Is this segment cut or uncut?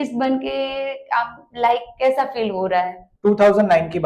cut